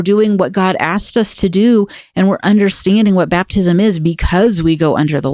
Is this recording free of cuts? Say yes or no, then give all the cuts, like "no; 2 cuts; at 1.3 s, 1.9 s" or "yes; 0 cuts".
yes; 0 cuts